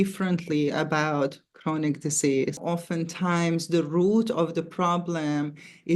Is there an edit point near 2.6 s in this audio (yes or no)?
yes